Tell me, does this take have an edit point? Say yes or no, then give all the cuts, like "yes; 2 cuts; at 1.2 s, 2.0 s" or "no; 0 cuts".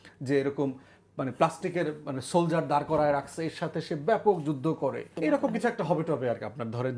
yes; 1 cut; at 5.1 s